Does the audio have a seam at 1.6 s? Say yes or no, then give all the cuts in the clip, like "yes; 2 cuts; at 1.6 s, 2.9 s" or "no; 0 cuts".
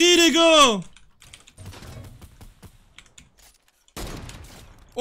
yes; 1 cut; at 1.6 s